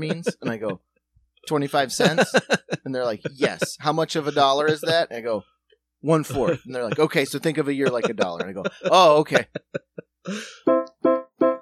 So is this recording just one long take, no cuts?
no; 1 cut; at 10.5 s

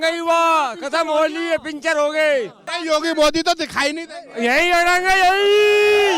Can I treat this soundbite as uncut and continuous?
no; 1 cut; at 2.6 s

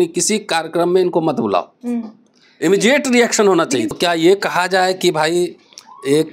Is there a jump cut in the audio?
yes; 1 cut; at 3.9 s

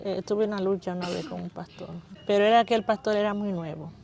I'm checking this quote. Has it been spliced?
yes; 1 cut; at 2.1 s

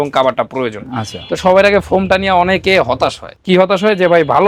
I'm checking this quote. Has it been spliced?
no; 0 cuts

